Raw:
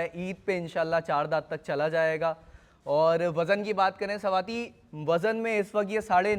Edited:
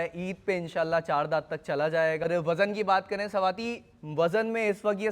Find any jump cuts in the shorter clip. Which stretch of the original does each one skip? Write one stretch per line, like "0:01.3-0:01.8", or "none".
0:02.2-0:03.1